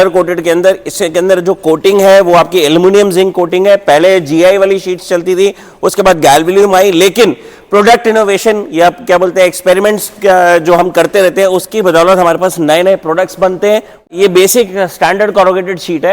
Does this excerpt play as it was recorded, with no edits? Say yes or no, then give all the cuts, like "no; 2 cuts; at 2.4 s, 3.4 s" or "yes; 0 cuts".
no; 1 cut; at 14.1 s